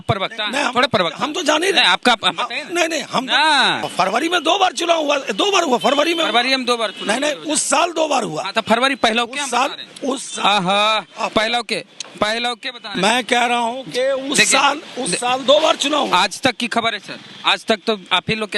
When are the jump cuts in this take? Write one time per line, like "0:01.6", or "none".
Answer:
0:03.8

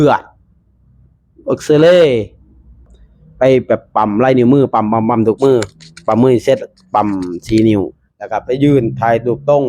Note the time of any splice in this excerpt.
0:02.9

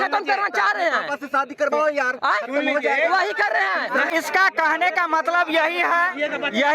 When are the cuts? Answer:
0:04.1

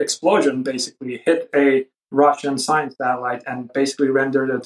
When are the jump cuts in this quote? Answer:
0:03.6

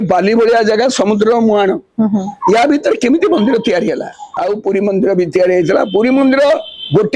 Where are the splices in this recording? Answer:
0:04.2

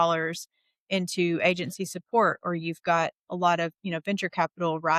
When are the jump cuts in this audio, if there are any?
none

